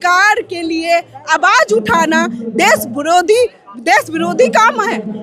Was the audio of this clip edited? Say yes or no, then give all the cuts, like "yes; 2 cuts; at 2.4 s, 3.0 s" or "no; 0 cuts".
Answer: no; 0 cuts